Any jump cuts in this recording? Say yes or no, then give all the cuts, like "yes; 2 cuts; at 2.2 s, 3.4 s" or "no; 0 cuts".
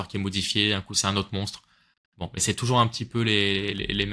no; 0 cuts